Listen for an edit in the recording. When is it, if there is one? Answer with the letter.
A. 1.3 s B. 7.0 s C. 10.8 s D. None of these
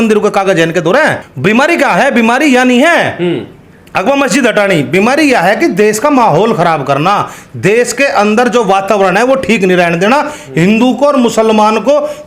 A